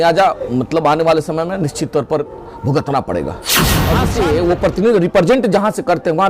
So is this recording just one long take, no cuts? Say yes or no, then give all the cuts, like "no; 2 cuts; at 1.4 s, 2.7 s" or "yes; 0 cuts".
no; 1 cut; at 3.8 s